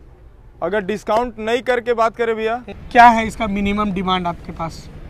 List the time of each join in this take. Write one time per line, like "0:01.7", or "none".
0:02.7